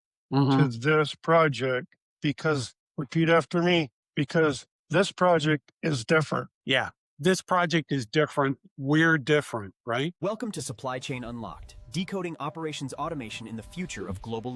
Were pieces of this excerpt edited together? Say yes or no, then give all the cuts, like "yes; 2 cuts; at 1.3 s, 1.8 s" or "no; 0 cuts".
yes; 1 cut; at 10.1 s